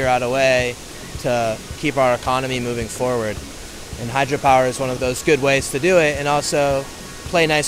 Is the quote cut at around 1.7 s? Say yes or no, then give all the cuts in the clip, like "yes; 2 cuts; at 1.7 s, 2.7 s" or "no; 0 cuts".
yes; 2 cuts; at 1.7 s, 4.9 s